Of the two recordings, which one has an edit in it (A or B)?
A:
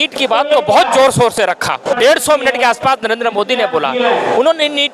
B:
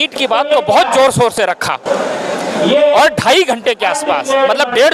A